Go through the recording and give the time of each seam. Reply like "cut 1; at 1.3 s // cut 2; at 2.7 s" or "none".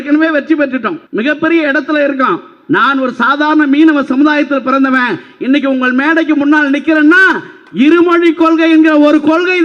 cut 1; at 1.0 s